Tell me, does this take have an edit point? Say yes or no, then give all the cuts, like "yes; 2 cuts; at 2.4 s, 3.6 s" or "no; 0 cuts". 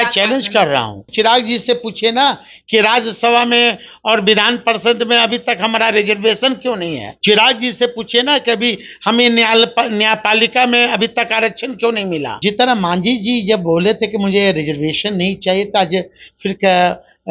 yes; 3 cuts; at 1.1 s, 7.1 s, 12.3 s